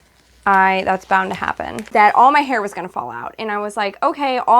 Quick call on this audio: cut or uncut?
cut